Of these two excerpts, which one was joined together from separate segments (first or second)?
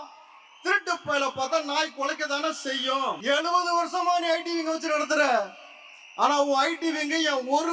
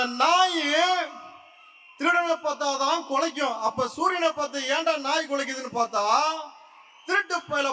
first